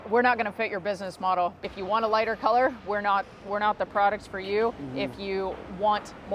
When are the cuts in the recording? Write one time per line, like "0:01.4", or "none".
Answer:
0:01.6